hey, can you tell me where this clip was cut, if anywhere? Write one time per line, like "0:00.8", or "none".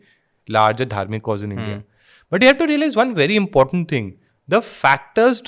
none